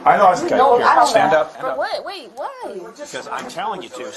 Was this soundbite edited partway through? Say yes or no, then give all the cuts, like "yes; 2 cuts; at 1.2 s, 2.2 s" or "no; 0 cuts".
no; 0 cuts